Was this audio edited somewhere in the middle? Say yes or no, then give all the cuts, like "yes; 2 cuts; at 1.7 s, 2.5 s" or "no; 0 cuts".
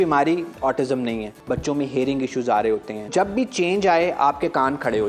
yes; 2 cuts; at 1.3 s, 3.1 s